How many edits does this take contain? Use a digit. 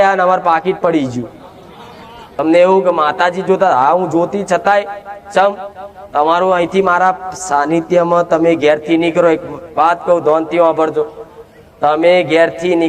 1